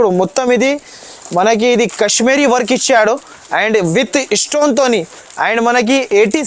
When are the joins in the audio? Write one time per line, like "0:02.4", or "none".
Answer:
none